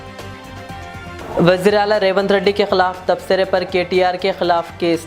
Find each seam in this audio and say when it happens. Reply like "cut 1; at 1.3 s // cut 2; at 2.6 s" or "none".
cut 1; at 1.2 s